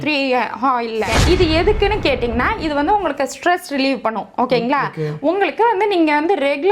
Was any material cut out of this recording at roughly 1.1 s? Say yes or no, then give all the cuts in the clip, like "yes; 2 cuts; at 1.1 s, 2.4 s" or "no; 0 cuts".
yes; 1 cut; at 1.1 s